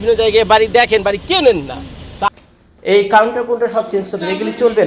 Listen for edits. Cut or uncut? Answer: cut